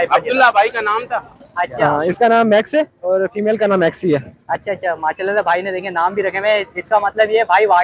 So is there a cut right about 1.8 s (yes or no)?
yes